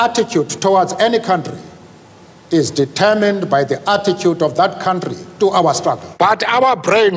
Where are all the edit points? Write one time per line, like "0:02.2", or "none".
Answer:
0:06.1

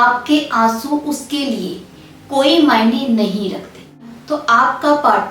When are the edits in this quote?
0:04.0

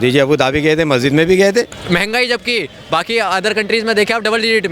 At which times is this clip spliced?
0:01.8

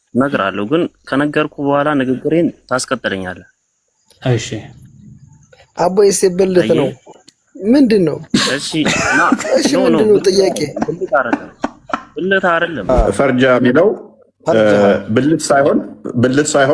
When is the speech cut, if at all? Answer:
0:12.9

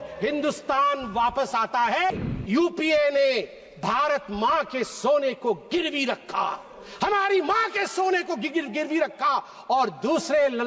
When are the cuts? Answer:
0:02.1

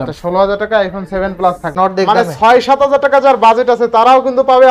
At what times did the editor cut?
0:01.7

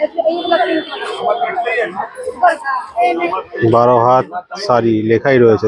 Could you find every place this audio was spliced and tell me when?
0:03.3

